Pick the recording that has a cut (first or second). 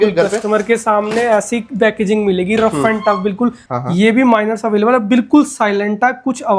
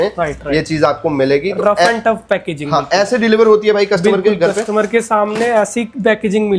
first